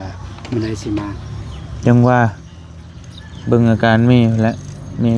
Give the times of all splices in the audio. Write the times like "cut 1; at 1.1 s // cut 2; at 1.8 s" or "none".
none